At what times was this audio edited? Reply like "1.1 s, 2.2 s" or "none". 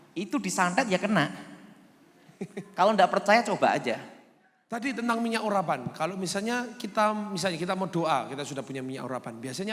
4.8 s